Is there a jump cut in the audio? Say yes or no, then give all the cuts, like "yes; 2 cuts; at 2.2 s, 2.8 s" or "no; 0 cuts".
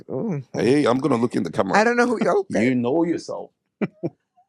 no; 0 cuts